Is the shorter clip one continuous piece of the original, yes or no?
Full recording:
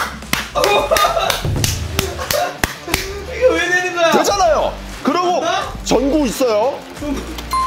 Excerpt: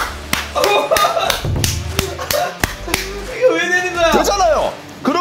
yes